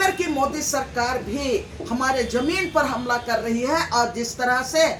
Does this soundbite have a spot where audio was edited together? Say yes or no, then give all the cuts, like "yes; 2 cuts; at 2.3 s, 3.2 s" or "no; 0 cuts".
no; 0 cuts